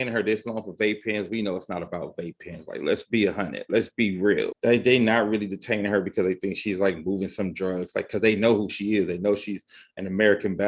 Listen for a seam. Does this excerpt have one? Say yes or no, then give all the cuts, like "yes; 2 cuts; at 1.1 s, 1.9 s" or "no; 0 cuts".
yes; 1 cut; at 4.5 s